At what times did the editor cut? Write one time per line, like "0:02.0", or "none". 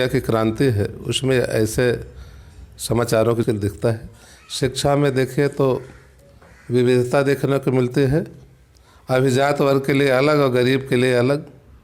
0:03.4

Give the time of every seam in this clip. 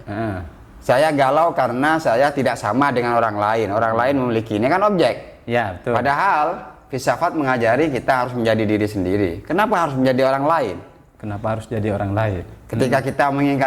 none

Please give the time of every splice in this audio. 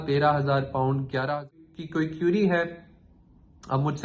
0:01.6

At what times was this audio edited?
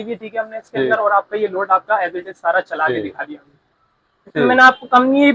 0:03.8

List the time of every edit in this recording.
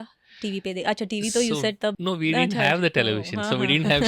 0:02.0

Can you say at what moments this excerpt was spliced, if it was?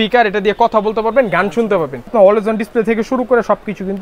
0:02.1

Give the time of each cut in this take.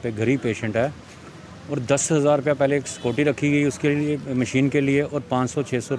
none

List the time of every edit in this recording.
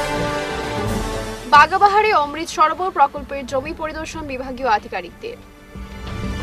0:01.0

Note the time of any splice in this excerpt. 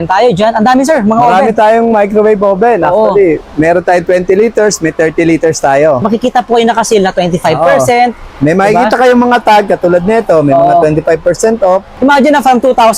0:06.0
0:11.9

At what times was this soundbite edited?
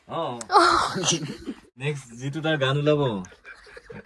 0:01.7

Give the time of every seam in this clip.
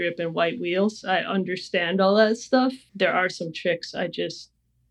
0:02.8

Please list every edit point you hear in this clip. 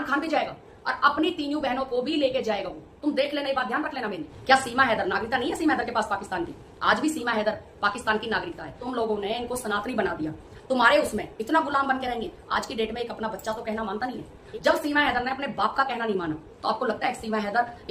0:04.3
0:08.8
0:14.3
0:16.5

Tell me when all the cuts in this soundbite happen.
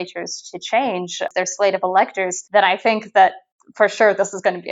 0:01.2
0:02.3

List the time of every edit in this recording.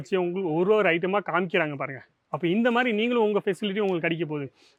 none

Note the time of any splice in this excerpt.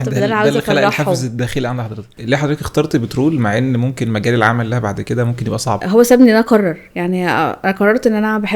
0:02.2
0:05.8

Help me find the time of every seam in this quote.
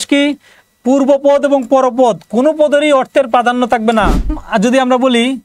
0:04.4

